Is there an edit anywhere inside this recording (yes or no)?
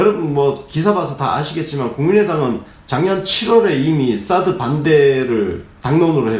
yes